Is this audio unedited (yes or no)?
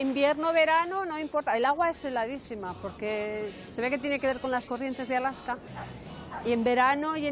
yes